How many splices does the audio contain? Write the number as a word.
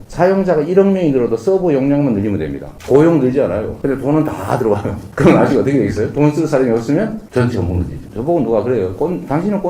two